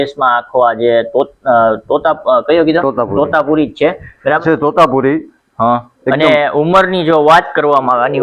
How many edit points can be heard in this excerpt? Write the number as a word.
one